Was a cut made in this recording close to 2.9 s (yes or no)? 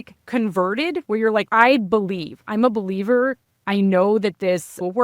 no